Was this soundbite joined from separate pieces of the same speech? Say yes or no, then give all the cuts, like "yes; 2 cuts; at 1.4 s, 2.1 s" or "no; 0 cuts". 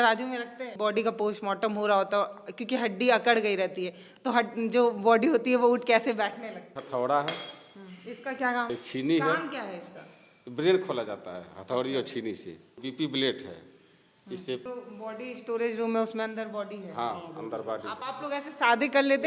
yes; 6 cuts; at 0.8 s, 6.8 s, 8.7 s, 12.8 s, 14.6 s, 18.0 s